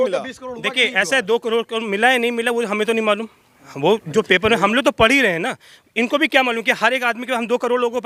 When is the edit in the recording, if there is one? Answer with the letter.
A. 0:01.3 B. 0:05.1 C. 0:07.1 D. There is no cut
D